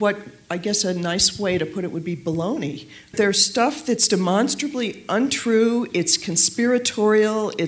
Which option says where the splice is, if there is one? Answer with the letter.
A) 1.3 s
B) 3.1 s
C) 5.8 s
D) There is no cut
B